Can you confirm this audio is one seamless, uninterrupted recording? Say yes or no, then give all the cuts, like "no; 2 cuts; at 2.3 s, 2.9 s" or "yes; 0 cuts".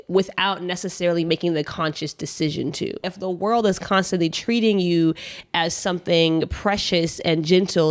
no; 1 cut; at 3.1 s